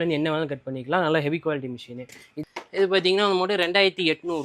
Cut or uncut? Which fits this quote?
cut